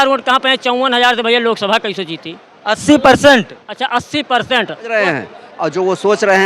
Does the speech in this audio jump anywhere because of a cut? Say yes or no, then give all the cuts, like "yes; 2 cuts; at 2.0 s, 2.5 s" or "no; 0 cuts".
yes; 1 cut; at 4.9 s